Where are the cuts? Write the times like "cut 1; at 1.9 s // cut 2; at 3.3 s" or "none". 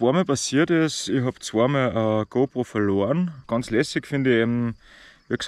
cut 1; at 3.4 s